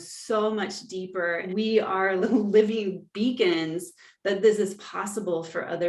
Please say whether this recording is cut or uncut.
cut